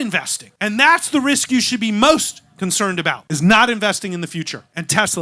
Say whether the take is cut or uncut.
cut